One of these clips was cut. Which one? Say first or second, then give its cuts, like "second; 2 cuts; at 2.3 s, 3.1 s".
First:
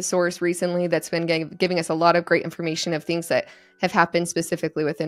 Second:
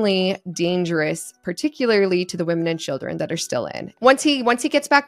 second; 1 cut; at 4.0 s